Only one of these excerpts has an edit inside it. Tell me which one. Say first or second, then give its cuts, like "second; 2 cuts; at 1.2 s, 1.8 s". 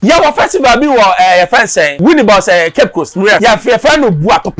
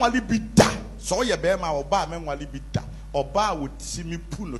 first; 2 cuts; at 1.9 s, 3.4 s